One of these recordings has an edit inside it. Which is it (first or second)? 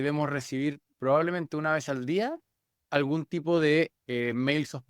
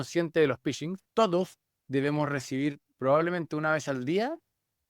second